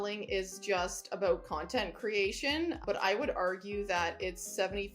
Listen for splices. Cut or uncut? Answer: cut